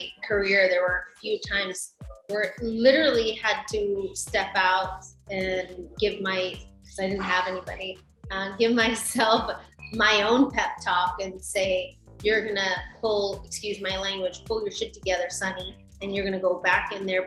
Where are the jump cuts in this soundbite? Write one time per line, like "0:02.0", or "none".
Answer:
none